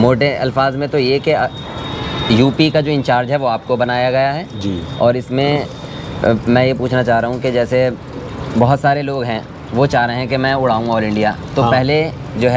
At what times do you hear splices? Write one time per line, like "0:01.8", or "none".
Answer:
none